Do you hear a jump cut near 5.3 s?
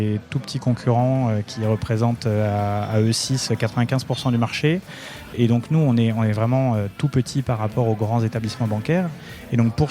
yes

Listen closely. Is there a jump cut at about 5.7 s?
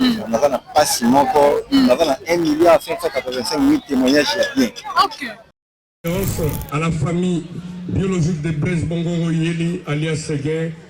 yes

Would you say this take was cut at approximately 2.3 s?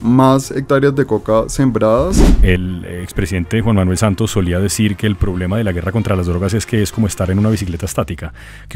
yes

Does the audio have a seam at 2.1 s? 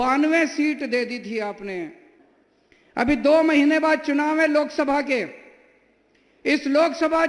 yes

